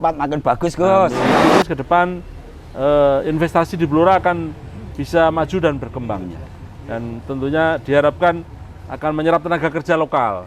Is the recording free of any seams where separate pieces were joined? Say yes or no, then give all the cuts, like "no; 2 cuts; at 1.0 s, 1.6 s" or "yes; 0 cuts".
no; 1 cut; at 1.4 s